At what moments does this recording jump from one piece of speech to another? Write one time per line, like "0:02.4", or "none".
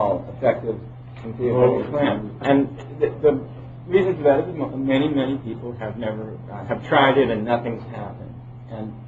0:04.2

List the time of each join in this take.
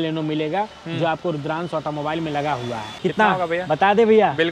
0:02.8

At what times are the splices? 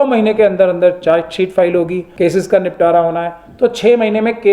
0:02.0

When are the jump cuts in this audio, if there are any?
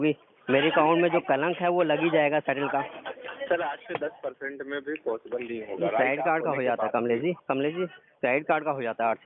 0:07.4

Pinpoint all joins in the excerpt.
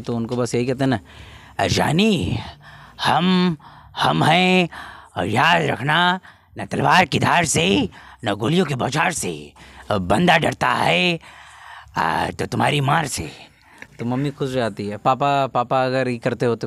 none

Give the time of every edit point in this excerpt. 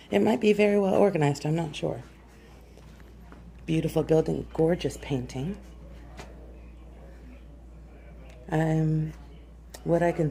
none

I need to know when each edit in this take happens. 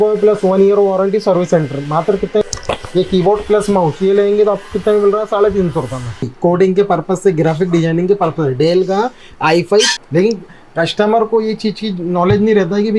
0:02.4
0:06.3
0:10.0

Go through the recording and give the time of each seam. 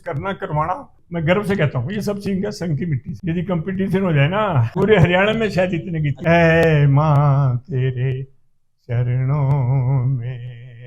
0:01.0
0:03.1
0:04.6
0:06.1

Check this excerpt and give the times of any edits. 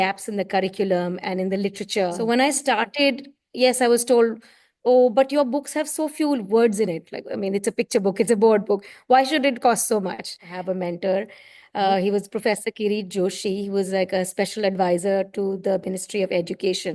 0:02.2
0:10.5

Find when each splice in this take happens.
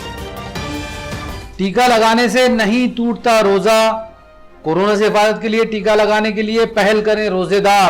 0:01.2

